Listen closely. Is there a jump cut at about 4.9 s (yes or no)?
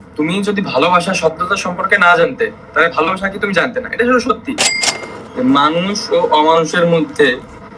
yes